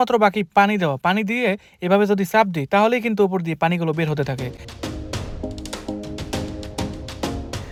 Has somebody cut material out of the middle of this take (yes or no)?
no